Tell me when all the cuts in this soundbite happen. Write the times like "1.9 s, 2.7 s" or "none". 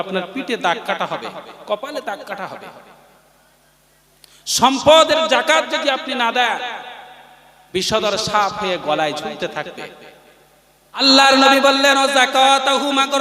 11.0 s